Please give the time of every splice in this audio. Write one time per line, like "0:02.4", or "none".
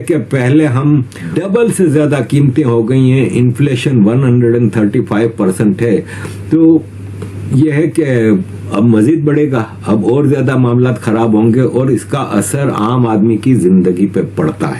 none